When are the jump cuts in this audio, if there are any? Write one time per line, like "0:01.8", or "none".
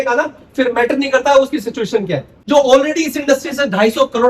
0:02.4